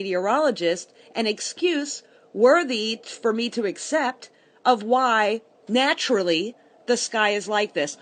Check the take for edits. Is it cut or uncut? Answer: uncut